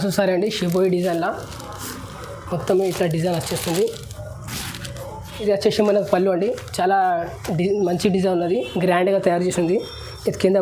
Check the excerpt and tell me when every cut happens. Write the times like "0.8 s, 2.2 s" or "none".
5.4 s